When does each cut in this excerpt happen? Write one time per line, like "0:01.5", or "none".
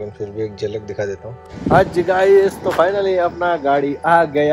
0:01.4